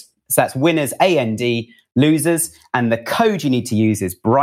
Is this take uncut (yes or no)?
yes